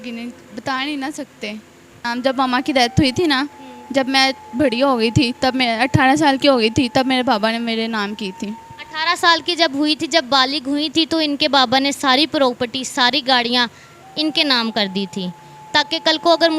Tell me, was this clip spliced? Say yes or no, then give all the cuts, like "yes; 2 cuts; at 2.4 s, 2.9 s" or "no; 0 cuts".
yes; 1 cut; at 2.0 s